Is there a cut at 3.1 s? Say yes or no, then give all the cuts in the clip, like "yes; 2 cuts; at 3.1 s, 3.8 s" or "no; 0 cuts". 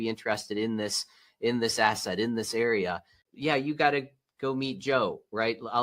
yes; 1 cut; at 3.1 s